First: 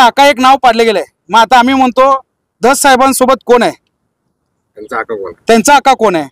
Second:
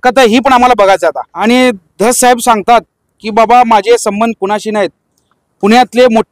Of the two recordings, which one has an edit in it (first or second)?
second